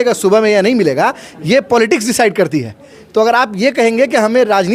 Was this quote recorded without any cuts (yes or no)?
yes